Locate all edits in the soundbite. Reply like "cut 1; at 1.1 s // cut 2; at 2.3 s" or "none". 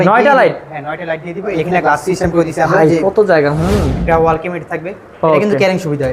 cut 1; at 1.6 s // cut 2; at 4.0 s